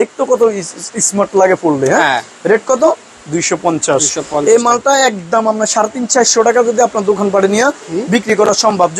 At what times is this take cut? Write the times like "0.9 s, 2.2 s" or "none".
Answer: none